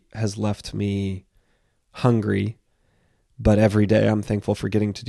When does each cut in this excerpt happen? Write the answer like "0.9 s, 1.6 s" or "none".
none